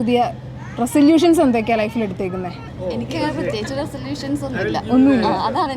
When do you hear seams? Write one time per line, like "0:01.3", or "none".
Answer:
0:02.7

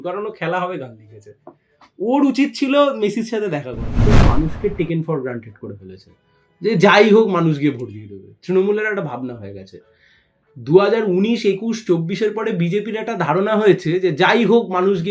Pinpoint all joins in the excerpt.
0:04.1

